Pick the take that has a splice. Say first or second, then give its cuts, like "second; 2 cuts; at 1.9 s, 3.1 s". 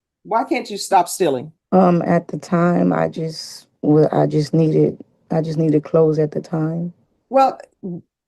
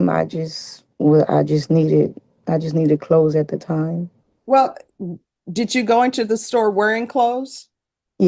first; 1 cut; at 1.5 s